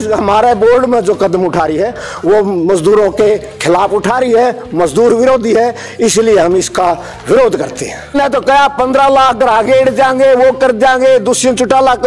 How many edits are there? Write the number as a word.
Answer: one